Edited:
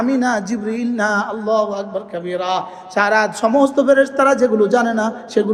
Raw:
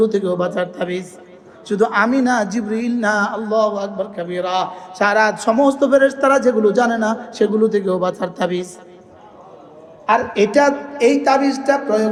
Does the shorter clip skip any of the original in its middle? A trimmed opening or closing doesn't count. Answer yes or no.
no